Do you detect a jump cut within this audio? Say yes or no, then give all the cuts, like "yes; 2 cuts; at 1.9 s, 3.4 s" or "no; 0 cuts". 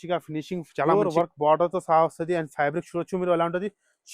yes; 1 cut; at 0.9 s